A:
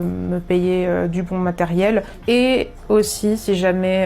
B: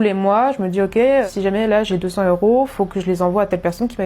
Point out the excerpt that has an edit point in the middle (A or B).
B